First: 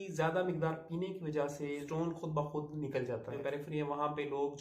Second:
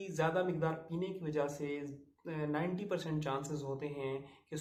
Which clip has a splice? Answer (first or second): first